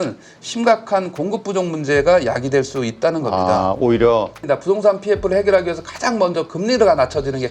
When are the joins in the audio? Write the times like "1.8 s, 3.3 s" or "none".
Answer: 4.4 s